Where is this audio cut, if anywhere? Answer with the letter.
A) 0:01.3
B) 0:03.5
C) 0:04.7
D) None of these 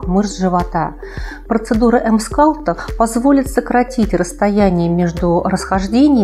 A